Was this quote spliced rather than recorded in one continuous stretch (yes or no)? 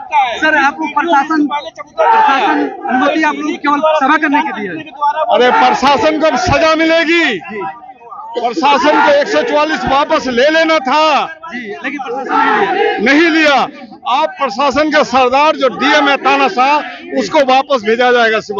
no